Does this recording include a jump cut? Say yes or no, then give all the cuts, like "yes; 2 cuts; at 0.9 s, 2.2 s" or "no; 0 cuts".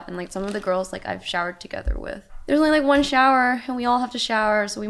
yes; 1 cut; at 2.3 s